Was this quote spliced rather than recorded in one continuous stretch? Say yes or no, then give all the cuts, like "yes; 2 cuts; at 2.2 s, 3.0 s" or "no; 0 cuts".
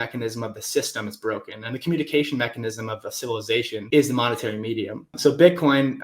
yes; 2 cuts; at 3.8 s, 5.1 s